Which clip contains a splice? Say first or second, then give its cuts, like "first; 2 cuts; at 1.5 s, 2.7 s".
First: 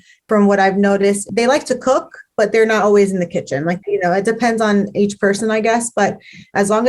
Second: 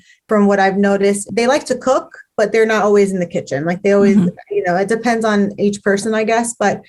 first; 1 cut; at 3.8 s